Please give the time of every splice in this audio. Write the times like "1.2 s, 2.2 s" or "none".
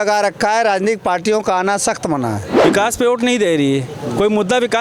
2.7 s